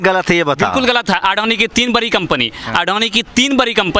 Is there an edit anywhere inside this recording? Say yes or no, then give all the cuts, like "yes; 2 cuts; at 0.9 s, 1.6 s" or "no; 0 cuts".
no; 0 cuts